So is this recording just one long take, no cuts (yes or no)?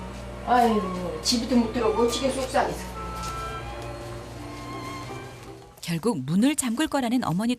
no